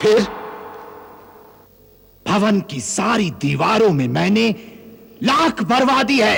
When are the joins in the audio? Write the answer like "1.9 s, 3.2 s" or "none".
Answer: none

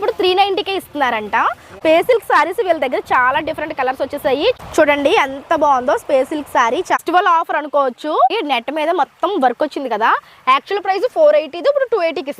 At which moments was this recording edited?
1.6 s, 4.7 s, 7.0 s, 8.3 s

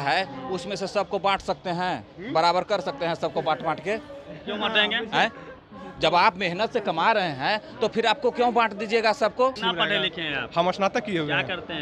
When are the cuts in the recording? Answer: 9.6 s

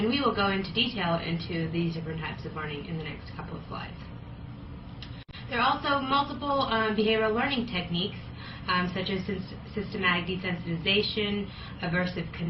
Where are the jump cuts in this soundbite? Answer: 5.3 s

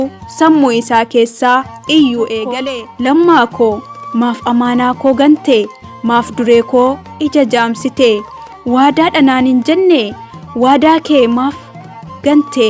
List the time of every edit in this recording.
2.6 s

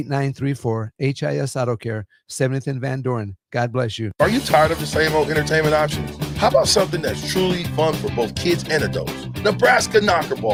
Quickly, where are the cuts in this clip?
none

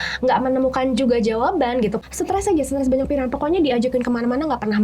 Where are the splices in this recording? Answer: 2.0 s

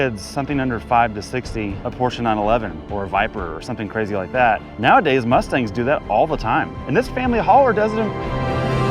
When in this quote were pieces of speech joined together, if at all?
1.8 s, 4.7 s, 6.8 s, 8.2 s

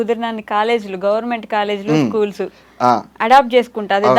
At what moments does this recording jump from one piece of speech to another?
none

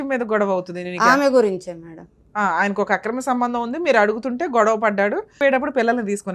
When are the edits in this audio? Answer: 5.4 s

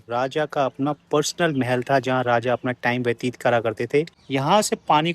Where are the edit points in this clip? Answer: 4.2 s

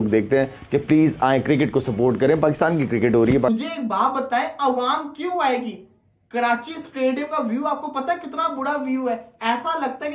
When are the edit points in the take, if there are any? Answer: 3.5 s

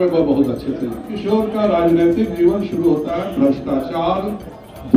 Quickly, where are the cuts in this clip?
1.1 s

